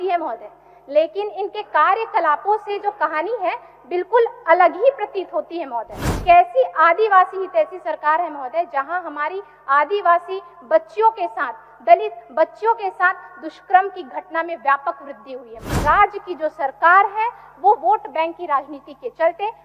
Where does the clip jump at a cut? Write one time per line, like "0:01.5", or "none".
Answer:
0:06.0
0:15.7